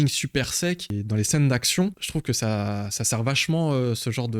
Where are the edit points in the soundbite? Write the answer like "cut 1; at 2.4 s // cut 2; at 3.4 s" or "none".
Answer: cut 1; at 1.0 s // cut 2; at 2.0 s